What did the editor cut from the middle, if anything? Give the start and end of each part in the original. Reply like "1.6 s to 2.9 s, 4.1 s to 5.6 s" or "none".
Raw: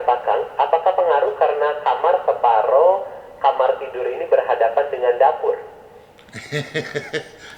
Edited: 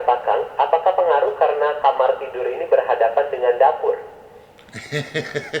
1.8 s to 3.4 s